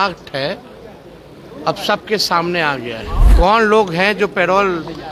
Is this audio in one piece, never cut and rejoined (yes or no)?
no